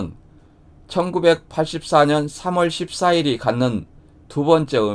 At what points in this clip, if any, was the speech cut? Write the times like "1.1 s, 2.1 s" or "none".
none